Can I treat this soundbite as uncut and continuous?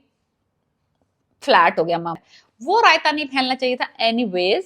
no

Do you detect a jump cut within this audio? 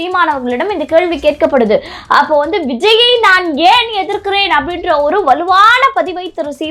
no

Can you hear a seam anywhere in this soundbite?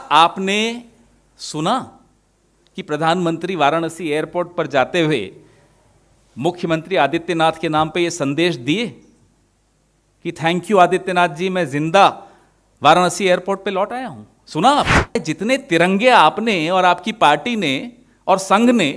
yes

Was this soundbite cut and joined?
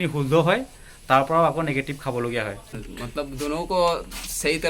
yes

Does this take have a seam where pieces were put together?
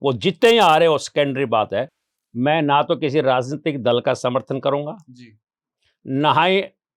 yes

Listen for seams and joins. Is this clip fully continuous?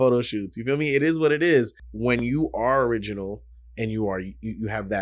no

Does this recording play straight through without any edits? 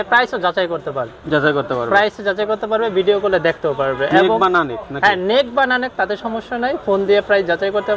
yes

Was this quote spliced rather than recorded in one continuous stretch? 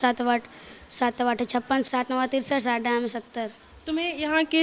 yes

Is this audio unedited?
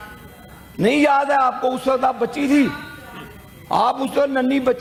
yes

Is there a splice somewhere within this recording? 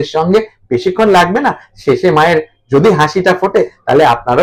no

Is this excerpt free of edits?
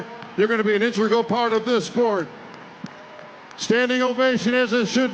yes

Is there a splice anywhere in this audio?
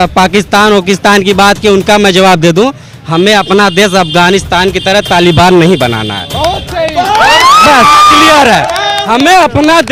no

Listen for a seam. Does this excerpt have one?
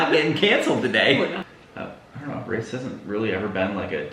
yes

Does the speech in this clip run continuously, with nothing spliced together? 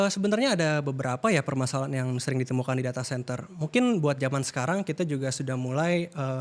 yes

